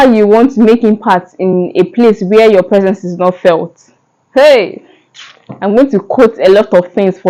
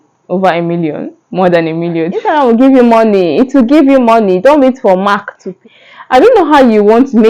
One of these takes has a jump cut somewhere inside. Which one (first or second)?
second